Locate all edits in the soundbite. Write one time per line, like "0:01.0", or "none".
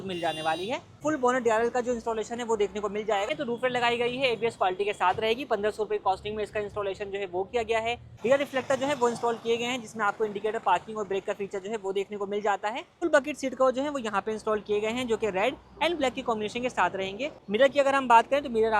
0:00.9
0:03.3
0:08.1
0:13.0
0:17.4